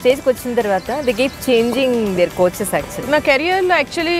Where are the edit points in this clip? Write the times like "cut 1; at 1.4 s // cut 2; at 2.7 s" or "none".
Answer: cut 1; at 3.0 s